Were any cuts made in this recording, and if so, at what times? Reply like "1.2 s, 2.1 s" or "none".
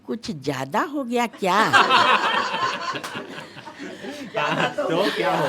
none